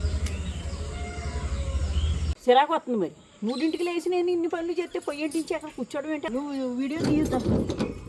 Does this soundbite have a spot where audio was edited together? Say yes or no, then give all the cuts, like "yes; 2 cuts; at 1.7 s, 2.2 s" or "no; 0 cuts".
yes; 2 cuts; at 2.4 s, 6.2 s